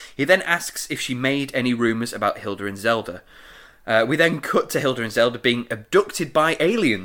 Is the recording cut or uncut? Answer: uncut